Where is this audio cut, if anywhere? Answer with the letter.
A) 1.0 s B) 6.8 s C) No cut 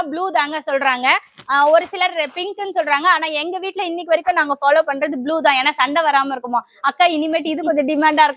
C